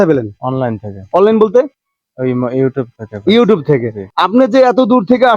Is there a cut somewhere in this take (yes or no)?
yes